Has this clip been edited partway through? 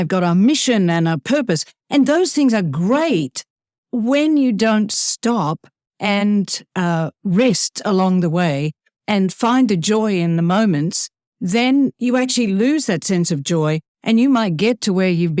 no; 0 cuts

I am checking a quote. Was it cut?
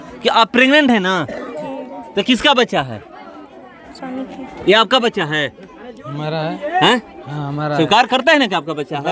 no; 0 cuts

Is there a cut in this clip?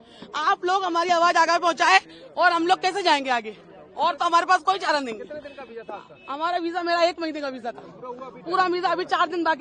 no; 0 cuts

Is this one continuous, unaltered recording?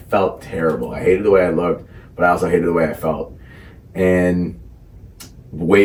yes; 0 cuts

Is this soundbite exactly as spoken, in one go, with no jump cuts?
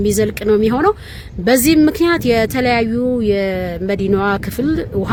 yes; 0 cuts

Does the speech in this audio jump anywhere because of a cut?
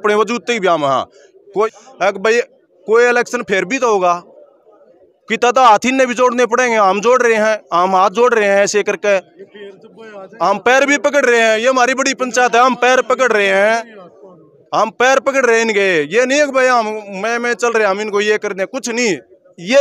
yes; 1 cut; at 1.7 s

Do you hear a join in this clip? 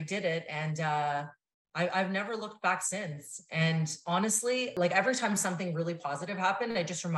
yes; 1 cut; at 4.7 s

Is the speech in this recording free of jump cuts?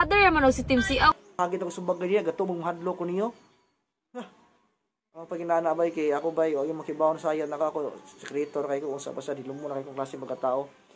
no; 1 cut; at 1.3 s

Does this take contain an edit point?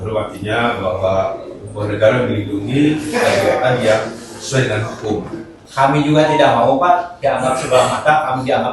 yes; 1 cut; at 5.6 s

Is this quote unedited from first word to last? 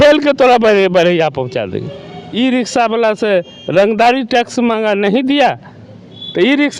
no; 1 cut; at 2.2 s

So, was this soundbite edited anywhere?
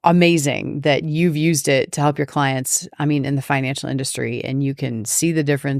no; 0 cuts

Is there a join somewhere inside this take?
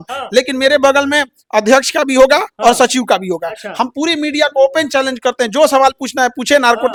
no; 0 cuts

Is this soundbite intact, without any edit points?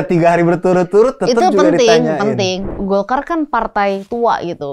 no; 1 cut; at 2.6 s

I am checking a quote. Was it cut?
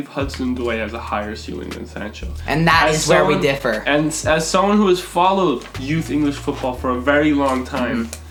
no; 0 cuts

